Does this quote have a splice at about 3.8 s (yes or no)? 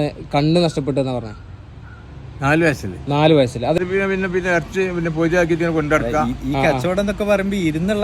yes